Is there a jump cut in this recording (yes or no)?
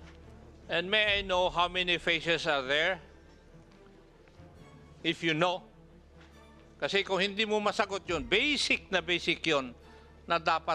yes